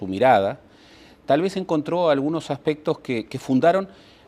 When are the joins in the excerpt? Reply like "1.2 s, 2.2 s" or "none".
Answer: 2.4 s